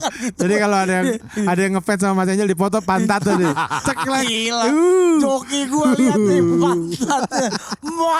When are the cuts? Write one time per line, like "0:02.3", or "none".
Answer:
none